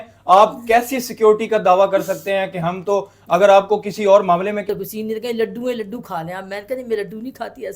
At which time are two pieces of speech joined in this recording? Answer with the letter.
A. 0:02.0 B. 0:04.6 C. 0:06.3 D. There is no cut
B